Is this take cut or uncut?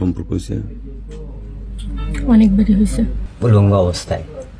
cut